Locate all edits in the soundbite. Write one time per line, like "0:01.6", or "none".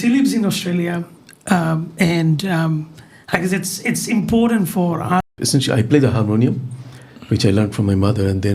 0:05.3

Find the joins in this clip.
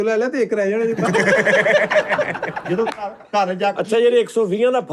none

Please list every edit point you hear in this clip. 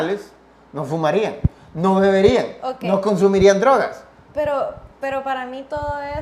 0:02.5

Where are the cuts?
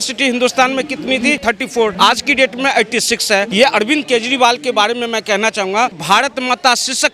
0:01.6
0:03.5
0:06.0

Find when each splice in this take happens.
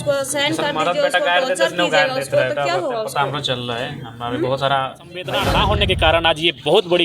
0:05.4

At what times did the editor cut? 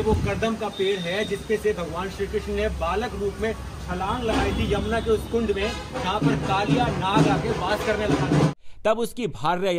0:08.5

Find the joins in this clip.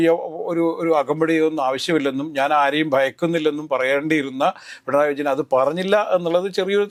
none

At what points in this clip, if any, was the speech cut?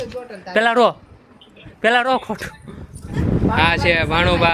0:03.1

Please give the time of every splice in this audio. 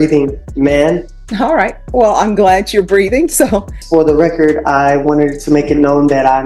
0:01.2
0:03.8

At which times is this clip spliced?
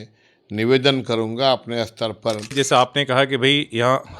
0:02.5

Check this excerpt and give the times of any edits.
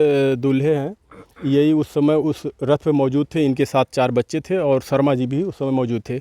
none

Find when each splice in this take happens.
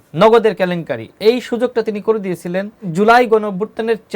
0:02.9

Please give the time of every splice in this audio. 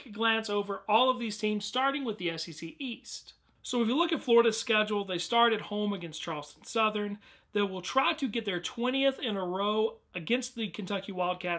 0:09.2

